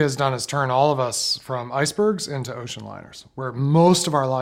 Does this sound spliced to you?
no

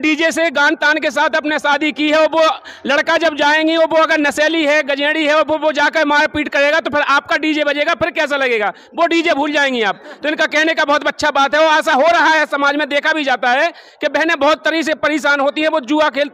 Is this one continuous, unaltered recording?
yes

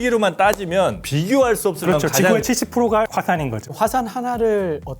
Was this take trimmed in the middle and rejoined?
yes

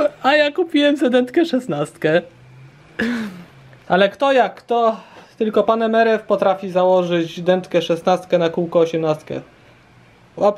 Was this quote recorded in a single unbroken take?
yes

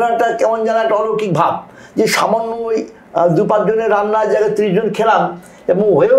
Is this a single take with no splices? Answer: yes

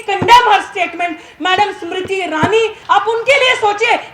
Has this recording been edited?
yes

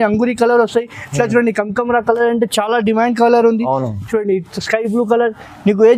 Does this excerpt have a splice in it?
no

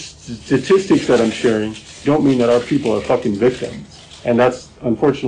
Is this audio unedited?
yes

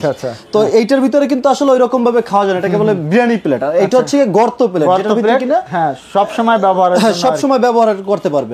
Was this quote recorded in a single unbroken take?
yes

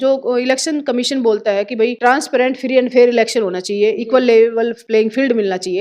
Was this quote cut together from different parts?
yes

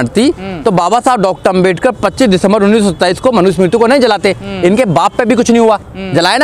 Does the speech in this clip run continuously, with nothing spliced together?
yes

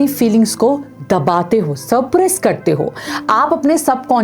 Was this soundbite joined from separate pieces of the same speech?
no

